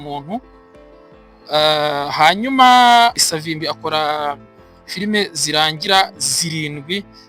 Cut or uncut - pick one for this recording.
cut